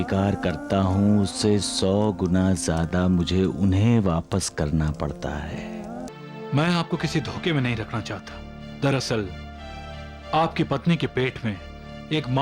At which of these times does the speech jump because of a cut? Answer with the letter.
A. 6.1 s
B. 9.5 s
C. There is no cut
A